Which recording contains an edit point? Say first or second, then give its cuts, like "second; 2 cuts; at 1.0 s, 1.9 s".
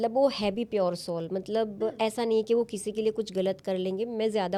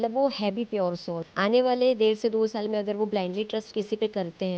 second; 1 cut; at 1.2 s